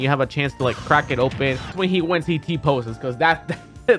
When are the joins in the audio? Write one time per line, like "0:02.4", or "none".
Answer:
0:01.8